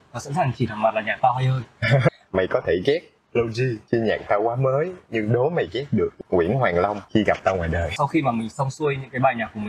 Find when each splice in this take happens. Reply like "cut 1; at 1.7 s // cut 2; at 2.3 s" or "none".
cut 1; at 2.1 s // cut 2; at 3.8 s // cut 3; at 6.1 s // cut 4; at 7.0 s // cut 5; at 7.9 s